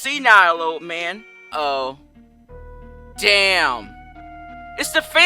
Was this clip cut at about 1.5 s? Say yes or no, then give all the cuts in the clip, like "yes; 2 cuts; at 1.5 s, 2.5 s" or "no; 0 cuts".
yes; 1 cut; at 1.5 s